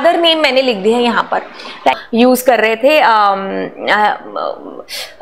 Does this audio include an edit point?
yes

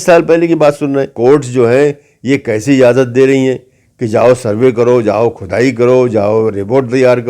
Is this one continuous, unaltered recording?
no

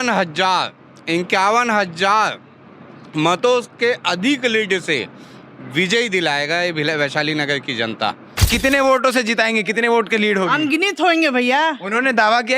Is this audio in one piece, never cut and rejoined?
no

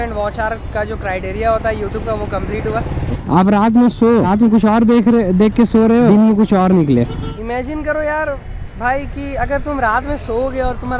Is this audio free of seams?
no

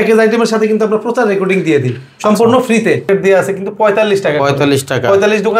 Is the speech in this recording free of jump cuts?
no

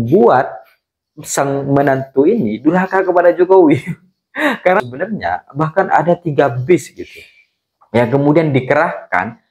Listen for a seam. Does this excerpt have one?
yes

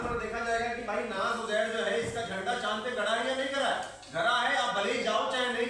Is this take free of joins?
yes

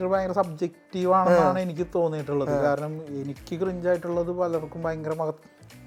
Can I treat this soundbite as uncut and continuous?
yes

